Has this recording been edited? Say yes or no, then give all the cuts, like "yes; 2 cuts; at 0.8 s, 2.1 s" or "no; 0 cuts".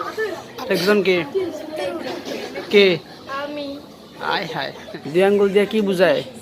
yes; 1 cut; at 4.8 s